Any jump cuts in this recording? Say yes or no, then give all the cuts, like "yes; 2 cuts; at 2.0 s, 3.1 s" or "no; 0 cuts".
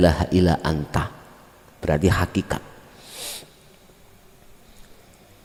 no; 0 cuts